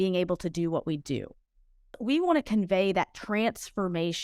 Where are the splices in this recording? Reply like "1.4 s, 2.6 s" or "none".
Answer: 1.8 s